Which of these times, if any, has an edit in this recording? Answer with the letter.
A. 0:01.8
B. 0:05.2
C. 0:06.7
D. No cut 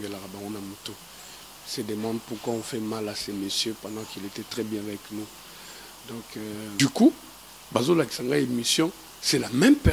C